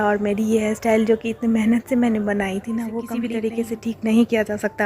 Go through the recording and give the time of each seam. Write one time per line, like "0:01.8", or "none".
0:03.1